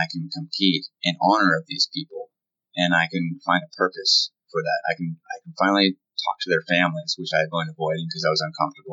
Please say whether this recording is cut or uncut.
cut